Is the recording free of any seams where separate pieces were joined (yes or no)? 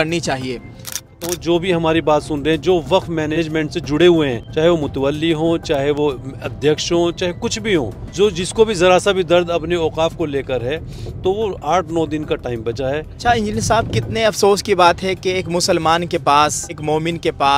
no